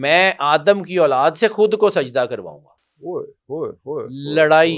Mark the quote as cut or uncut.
uncut